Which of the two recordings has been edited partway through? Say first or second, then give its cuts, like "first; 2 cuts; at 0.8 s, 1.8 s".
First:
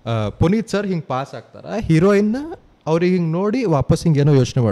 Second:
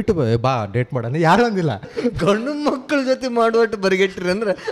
second; 1 cut; at 1.8 s